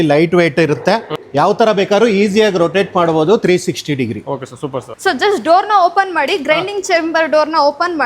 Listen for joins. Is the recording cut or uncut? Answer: cut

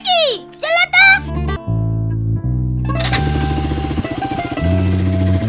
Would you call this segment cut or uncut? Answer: cut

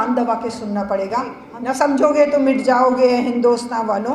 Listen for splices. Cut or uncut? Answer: cut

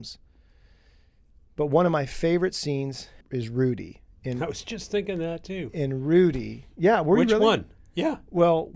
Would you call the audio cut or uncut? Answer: cut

